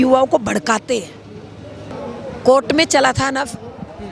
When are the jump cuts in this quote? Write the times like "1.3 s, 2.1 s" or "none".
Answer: 1.9 s